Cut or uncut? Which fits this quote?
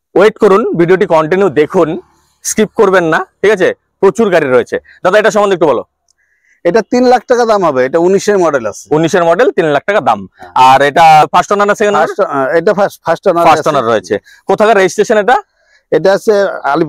uncut